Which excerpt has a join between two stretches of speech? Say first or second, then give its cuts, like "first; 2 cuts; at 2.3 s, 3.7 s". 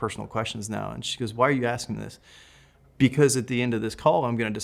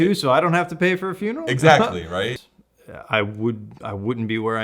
second; 1 cut; at 2.3 s